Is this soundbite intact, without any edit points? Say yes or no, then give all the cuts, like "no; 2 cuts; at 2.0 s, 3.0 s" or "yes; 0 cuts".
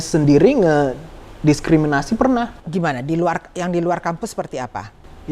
yes; 0 cuts